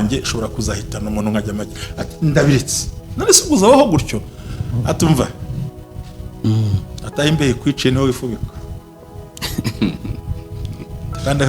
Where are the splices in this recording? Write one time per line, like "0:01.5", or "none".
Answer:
none